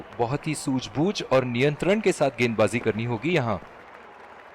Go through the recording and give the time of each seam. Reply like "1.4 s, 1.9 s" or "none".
3.6 s